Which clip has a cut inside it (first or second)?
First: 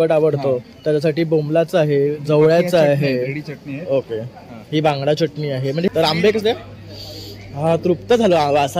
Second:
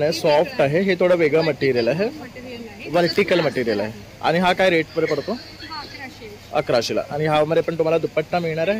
first